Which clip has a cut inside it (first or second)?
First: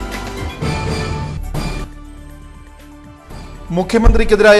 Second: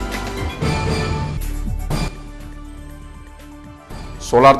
first